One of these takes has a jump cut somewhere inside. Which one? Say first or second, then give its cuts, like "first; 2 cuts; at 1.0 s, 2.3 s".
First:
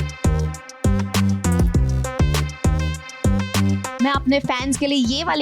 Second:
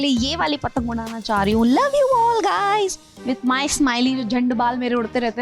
first; 1 cut; at 3.9 s